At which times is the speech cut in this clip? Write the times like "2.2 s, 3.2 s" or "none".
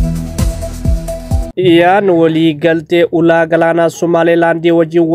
1.1 s